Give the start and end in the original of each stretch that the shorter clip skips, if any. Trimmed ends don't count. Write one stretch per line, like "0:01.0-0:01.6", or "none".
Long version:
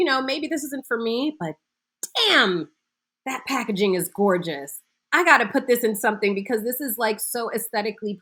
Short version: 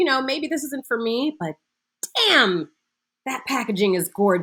none